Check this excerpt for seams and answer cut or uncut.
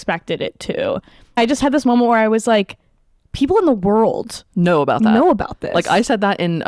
cut